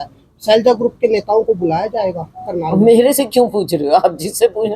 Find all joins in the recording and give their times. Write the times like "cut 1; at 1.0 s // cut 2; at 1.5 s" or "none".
none